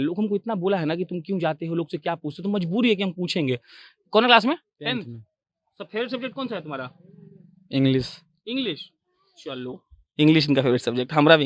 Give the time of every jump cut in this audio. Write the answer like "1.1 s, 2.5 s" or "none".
none